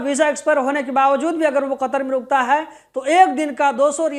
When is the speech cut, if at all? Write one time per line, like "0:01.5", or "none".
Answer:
none